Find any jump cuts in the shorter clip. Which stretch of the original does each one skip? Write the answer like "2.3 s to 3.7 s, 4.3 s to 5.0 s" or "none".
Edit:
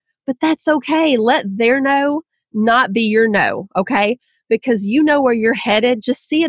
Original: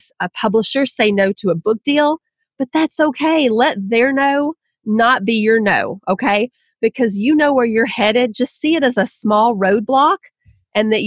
none